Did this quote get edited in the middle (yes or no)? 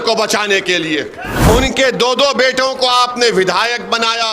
yes